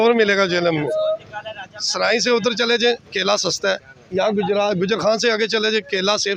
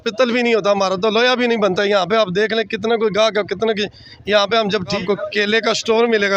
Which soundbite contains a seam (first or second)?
second